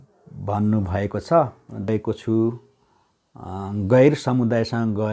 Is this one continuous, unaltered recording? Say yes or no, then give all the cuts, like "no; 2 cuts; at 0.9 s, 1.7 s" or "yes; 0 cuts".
no; 1 cut; at 1.9 s